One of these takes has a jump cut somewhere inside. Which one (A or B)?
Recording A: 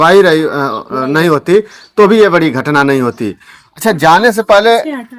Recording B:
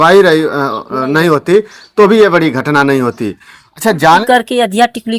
B